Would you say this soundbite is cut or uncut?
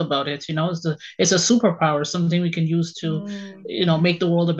uncut